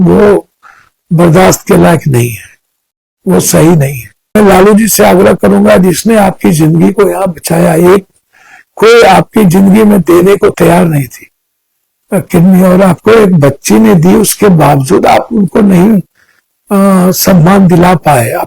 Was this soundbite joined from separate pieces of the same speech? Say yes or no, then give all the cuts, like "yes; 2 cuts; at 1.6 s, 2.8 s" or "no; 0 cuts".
yes; 1 cut; at 4.4 s